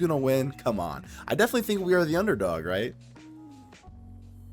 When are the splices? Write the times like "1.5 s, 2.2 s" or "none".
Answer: none